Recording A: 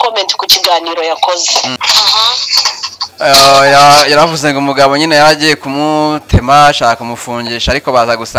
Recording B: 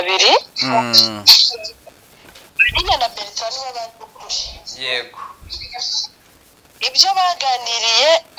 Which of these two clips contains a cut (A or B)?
A